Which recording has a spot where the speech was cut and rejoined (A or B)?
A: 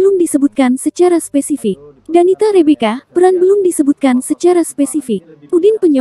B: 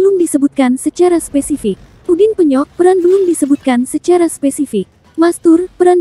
B